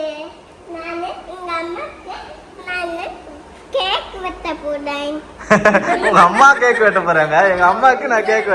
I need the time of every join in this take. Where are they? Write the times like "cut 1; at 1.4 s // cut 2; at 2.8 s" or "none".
none